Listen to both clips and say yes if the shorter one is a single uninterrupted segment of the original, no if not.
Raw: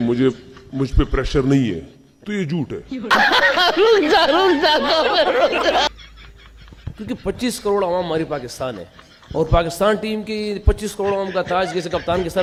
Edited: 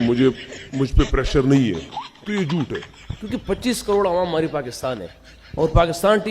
no